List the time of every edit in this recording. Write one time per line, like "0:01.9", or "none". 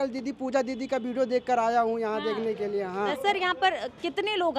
0:03.1